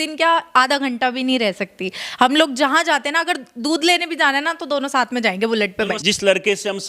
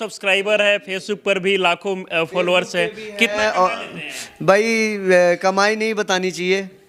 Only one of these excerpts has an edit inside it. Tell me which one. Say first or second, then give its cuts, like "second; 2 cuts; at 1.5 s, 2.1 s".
first; 1 cut; at 5.9 s